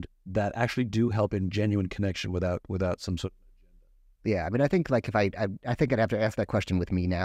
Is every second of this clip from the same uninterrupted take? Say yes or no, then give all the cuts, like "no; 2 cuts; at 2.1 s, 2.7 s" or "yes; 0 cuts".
yes; 0 cuts